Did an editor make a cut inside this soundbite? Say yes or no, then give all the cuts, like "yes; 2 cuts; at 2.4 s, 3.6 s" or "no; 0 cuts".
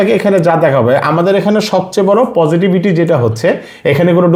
no; 0 cuts